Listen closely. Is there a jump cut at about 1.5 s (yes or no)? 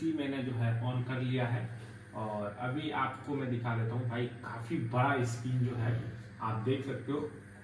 no